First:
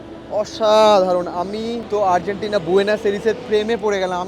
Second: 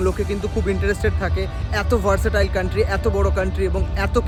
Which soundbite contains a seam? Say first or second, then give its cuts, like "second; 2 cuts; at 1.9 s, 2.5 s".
first; 1 cut; at 1.8 s